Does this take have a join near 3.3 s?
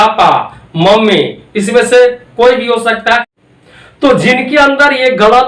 yes; 1 cut; at 3.3 s

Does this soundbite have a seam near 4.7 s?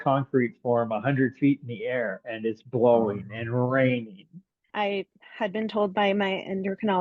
yes; 1 cut; at 4.7 s

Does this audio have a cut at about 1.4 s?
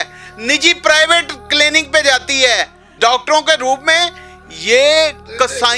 no; 1 cut; at 2.9 s

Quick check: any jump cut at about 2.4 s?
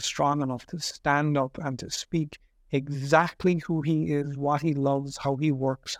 no; 0 cuts

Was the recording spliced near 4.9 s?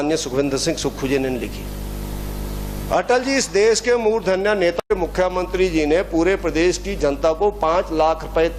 yes; 1 cut; at 4.9 s

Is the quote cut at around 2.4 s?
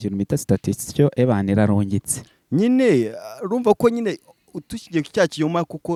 no; 0 cuts

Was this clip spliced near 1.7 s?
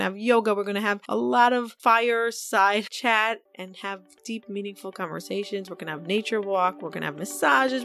yes; 1 cut; at 1.7 s

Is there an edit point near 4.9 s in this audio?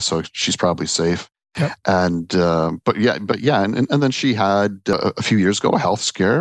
yes; 1 cut; at 4.9 s

